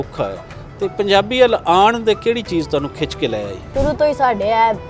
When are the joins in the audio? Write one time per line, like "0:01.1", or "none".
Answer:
0:03.7